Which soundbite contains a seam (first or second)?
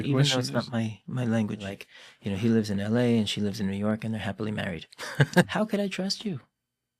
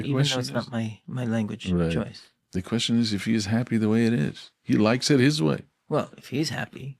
first